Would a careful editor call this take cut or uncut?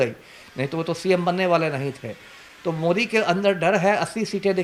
uncut